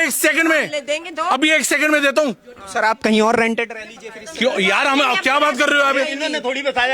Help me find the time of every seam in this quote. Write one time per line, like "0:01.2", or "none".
none